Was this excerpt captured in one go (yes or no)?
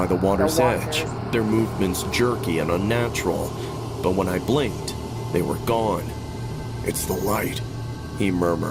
yes